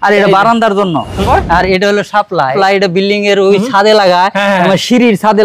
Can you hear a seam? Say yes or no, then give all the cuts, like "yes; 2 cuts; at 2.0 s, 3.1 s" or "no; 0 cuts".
yes; 2 cuts; at 1.4 s, 2.5 s